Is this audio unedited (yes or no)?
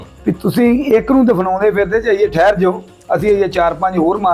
yes